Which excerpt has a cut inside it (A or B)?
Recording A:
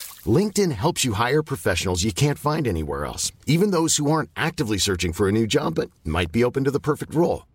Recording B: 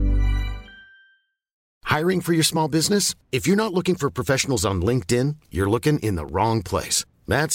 B